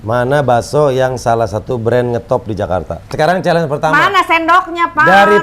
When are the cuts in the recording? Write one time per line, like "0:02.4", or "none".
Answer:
none